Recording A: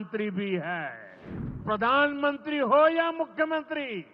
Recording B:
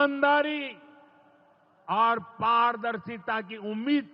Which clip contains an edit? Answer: A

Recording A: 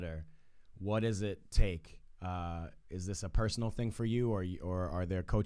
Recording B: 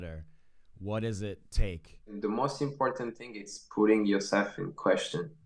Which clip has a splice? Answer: B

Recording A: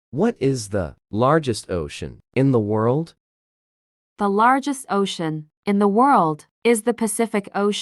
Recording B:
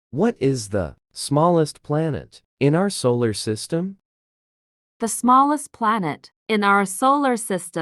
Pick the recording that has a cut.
A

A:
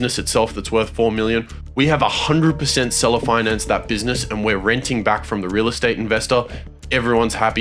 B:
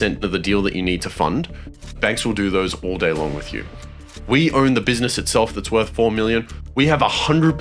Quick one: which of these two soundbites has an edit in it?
B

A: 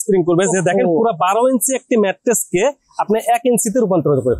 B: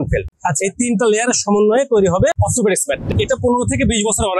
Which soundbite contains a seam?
B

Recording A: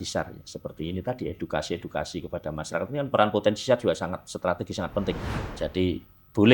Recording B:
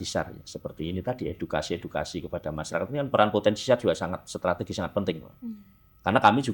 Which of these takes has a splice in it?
A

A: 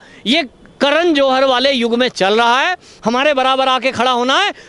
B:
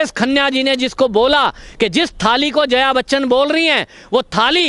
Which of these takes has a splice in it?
A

